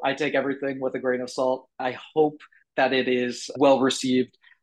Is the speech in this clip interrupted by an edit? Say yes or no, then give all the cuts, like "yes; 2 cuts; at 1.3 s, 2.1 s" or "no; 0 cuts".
yes; 1 cut; at 3.5 s